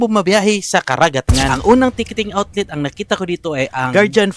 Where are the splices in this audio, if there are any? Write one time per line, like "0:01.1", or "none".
0:01.3